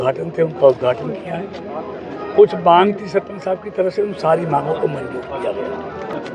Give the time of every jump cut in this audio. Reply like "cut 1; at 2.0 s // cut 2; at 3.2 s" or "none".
none